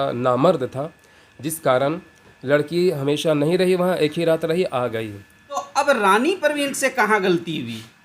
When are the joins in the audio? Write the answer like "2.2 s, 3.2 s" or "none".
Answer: 5.7 s